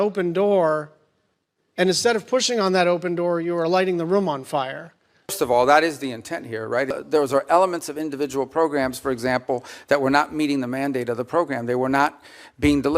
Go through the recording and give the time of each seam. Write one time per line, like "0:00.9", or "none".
0:05.3
0:06.9